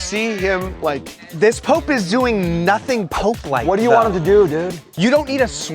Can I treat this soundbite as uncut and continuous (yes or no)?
no